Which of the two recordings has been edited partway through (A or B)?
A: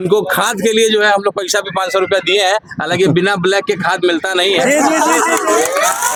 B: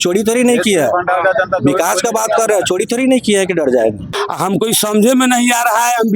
B